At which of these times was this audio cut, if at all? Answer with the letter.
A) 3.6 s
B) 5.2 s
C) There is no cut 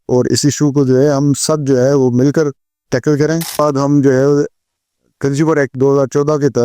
A